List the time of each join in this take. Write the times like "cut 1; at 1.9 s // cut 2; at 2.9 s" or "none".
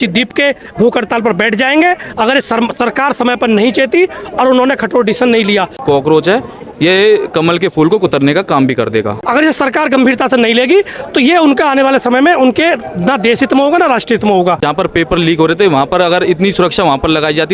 cut 1; at 5.8 s // cut 2; at 9.2 s // cut 3; at 14.6 s